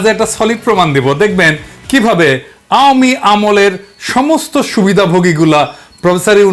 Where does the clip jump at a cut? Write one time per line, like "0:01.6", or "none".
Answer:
none